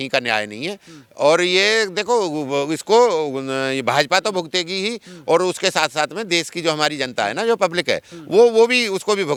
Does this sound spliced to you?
no; 0 cuts

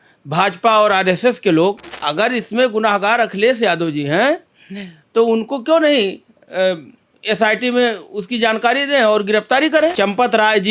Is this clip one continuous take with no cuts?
no; 2 cuts; at 1.9 s, 9.9 s

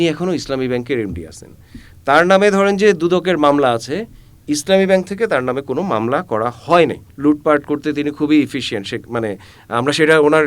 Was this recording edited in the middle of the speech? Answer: yes; 1 cut; at 7.1 s

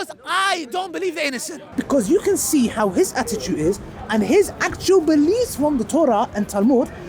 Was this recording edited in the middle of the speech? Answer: yes; 1 cut; at 1.7 s

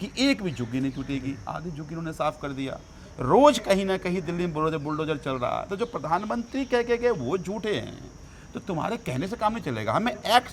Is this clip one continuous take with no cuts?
yes; 0 cuts

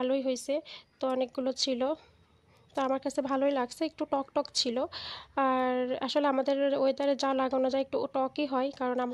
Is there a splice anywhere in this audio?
no; 0 cuts

